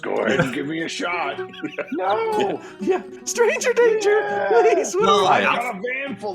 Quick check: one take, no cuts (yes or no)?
no